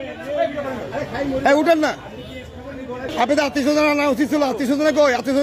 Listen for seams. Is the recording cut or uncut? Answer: cut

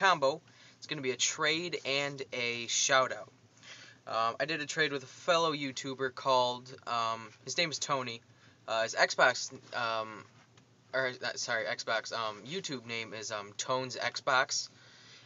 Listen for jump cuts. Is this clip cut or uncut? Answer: cut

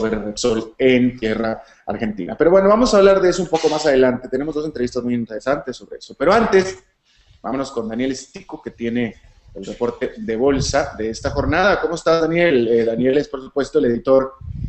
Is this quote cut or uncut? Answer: cut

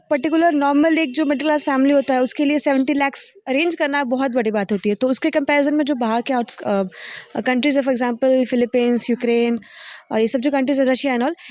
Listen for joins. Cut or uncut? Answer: uncut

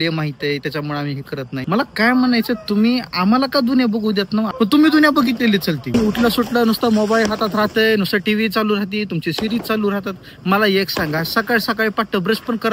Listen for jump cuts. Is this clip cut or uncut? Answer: cut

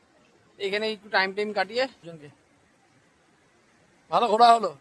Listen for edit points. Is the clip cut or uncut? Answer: cut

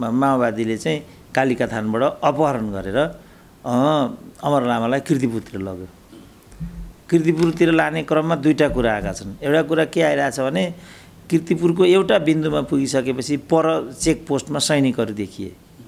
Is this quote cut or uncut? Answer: uncut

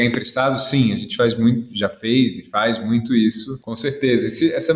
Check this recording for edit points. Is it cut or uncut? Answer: cut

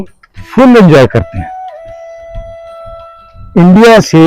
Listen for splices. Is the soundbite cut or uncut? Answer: uncut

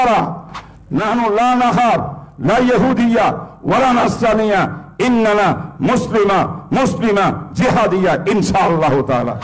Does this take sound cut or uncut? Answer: uncut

